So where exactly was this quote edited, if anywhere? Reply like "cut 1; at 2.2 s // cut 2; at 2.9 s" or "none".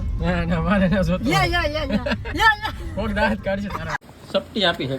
cut 1; at 4.0 s

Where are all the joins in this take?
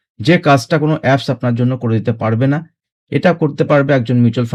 none

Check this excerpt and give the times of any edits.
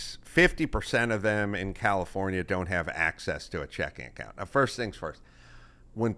none

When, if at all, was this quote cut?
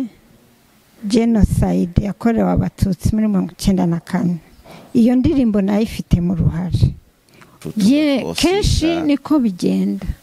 cut 1; at 7.5 s

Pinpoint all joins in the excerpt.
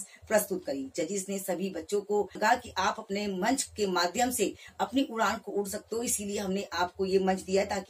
cut 1; at 2.3 s

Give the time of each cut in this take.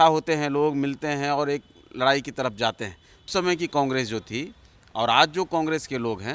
cut 1; at 3.3 s

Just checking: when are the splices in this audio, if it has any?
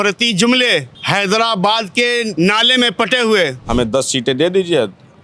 cut 1; at 1.0 s // cut 2; at 2.3 s // cut 3; at 3.6 s

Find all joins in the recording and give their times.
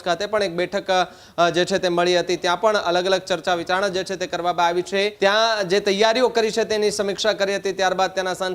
cut 1; at 5.1 s

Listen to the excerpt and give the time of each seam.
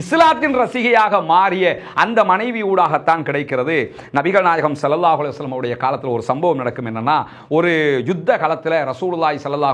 none

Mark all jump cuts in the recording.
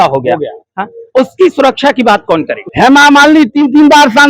cut 1; at 2.6 s

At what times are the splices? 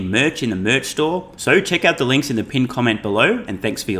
cut 1; at 1.3 s

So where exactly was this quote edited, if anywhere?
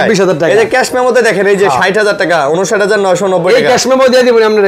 none

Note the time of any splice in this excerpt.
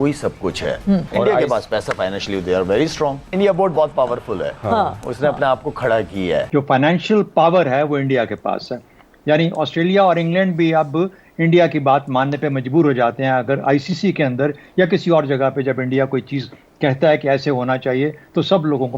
cut 1; at 1.1 s // cut 2; at 3.2 s // cut 3; at 6.5 s

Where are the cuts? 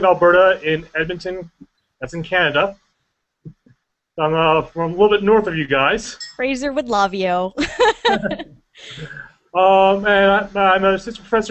cut 1; at 6.5 s

